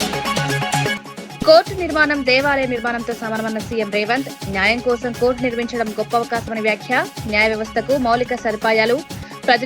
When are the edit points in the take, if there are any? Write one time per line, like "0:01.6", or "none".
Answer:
0:00.9